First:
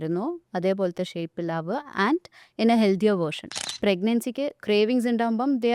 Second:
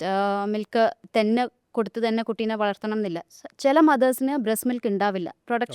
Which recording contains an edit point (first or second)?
first